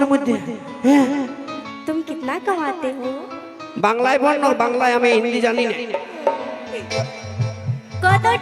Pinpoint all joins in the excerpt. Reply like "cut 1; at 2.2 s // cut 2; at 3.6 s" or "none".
cut 1; at 1.6 s